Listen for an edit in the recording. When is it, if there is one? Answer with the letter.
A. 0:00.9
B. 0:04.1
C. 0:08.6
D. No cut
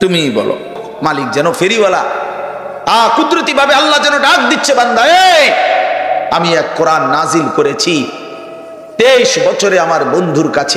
A